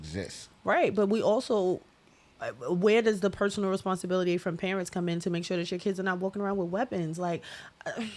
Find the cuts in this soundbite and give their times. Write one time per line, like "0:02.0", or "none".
none